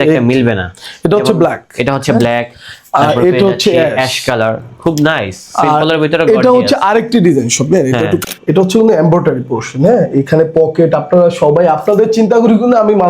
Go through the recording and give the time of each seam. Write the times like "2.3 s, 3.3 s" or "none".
8.2 s